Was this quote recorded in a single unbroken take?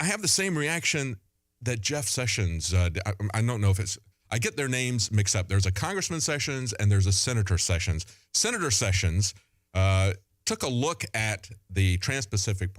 yes; 0 cuts

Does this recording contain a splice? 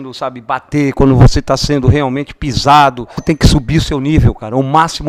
yes; 1 cut; at 3.2 s

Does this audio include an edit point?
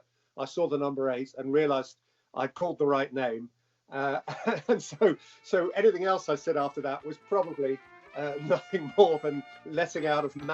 yes; 1 cut; at 9.5 s

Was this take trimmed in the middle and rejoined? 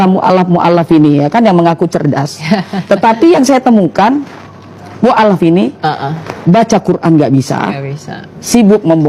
no; 0 cuts

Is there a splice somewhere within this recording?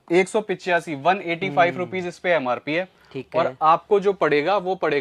no; 0 cuts

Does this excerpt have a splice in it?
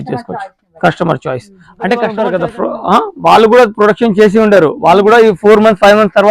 yes; 1 cut; at 2.1 s

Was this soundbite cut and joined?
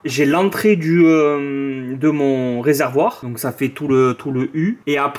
no; 0 cuts

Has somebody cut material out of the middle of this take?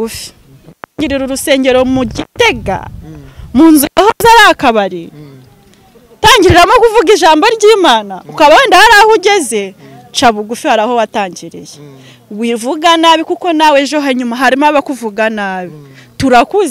no; 0 cuts

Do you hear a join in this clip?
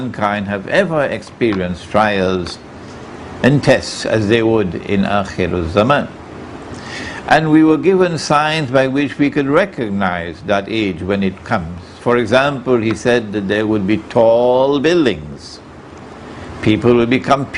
no; 0 cuts

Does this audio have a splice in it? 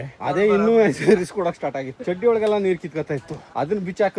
no; 0 cuts

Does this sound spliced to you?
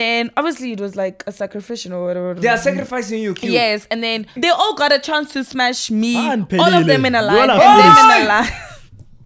yes; 1 cut; at 4.4 s

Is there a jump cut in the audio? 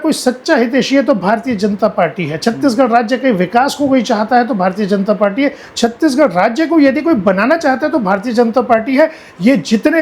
no; 0 cuts

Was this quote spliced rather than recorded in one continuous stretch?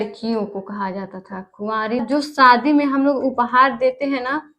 yes; 1 cut; at 2.0 s

